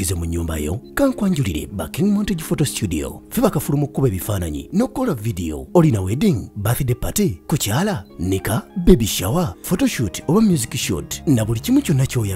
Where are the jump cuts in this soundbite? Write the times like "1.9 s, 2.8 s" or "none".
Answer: none